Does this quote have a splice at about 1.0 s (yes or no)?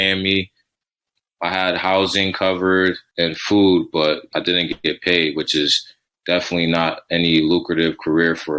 yes